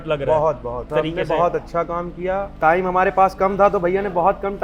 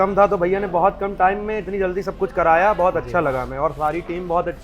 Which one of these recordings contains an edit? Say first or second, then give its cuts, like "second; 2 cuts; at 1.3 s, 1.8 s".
first; 2 cuts; at 0.8 s, 2.5 s